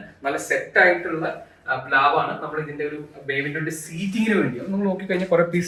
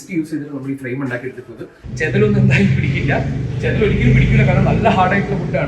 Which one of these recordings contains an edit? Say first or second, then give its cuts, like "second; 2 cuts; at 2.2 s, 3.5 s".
second; 1 cut; at 1.8 s